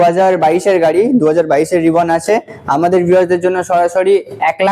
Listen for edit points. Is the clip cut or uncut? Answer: uncut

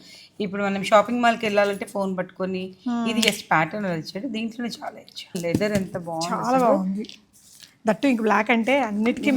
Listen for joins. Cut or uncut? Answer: cut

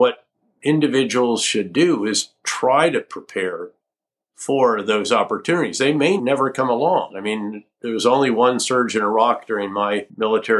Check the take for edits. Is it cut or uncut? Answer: cut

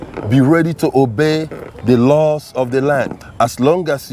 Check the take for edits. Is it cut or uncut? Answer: cut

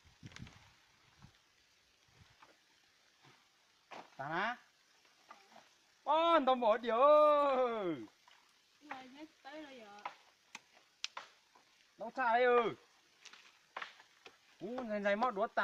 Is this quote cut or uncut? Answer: uncut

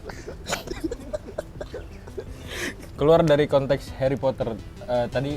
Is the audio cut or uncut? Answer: cut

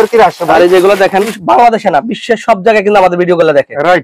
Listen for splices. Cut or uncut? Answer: cut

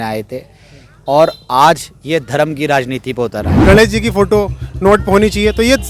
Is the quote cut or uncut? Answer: cut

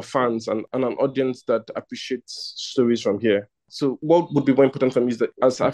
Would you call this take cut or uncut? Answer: uncut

